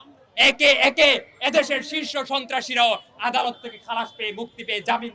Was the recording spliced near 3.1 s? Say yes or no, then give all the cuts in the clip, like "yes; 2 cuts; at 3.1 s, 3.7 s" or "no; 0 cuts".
no; 0 cuts